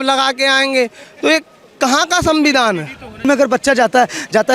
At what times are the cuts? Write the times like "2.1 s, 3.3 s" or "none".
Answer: 3.2 s